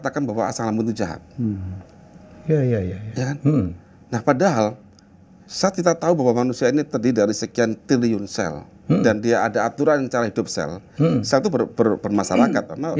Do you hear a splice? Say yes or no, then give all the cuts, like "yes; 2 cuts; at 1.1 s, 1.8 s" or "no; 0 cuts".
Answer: no; 0 cuts